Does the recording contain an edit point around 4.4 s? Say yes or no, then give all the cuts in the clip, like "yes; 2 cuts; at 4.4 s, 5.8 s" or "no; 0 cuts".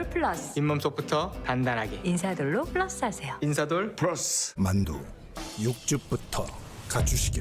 yes; 1 cut; at 4.4 s